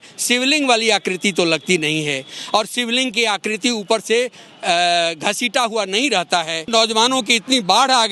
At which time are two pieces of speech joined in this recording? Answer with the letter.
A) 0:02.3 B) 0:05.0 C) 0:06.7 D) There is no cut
C